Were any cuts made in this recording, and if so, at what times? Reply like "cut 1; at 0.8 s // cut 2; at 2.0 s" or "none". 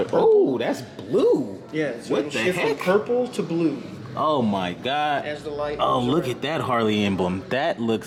none